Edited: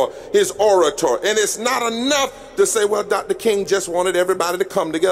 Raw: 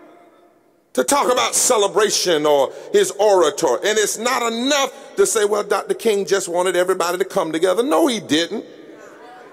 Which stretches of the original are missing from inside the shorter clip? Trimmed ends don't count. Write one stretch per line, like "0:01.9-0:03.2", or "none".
none